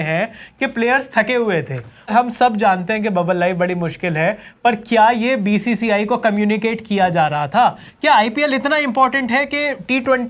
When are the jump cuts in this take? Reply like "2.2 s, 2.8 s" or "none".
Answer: 2.1 s